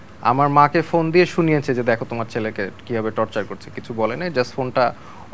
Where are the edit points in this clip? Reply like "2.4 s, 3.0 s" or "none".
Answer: none

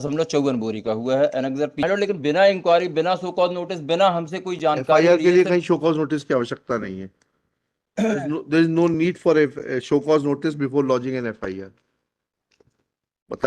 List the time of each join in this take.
1.8 s

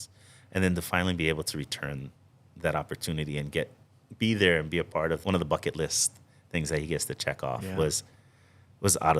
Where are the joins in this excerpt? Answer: 5.2 s

